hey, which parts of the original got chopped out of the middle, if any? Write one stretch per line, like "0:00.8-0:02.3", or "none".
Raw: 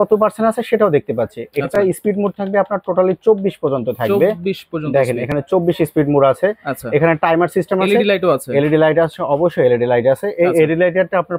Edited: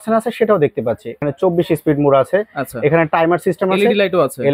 0:01.5-0:05.2